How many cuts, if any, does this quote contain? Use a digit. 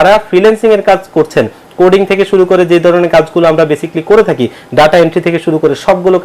0